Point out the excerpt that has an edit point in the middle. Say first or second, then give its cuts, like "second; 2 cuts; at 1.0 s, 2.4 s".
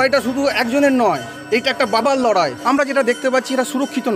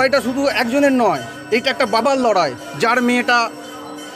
first; 1 cut; at 2.6 s